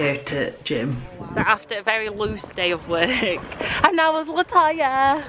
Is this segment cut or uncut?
cut